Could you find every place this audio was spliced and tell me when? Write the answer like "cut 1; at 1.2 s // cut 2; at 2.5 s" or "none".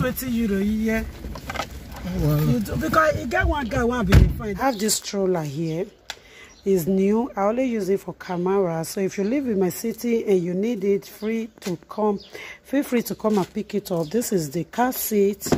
cut 1; at 4.6 s

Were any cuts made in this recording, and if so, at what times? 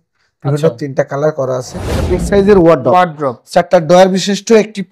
cut 1; at 2.1 s

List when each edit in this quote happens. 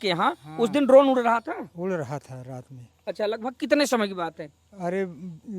none

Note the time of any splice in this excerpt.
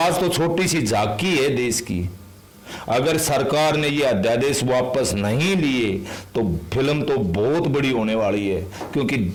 none

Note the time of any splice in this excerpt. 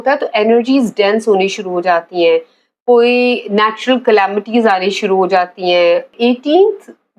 cut 1; at 6.1 s

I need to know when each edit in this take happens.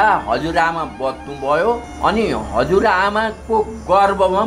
cut 1; at 1.9 s

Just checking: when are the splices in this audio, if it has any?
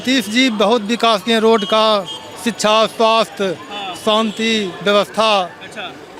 none

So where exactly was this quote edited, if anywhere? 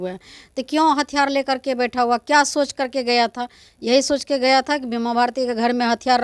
none

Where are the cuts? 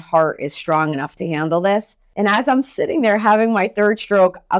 cut 1; at 2.0 s

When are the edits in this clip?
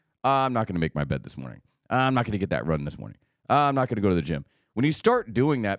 none

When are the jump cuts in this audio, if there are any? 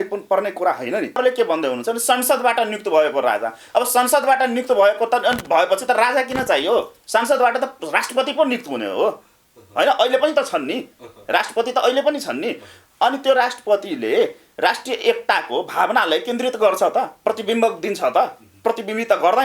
cut 1; at 1.2 s

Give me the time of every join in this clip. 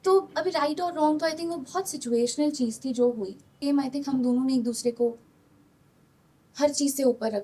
cut 1; at 3.5 s

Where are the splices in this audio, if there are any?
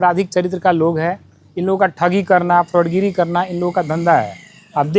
none

